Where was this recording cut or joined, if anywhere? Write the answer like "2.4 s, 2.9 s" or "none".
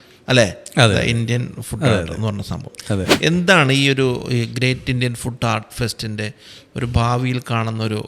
3.1 s